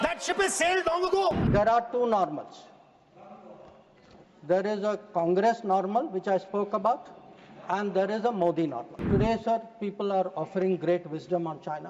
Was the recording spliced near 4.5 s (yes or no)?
no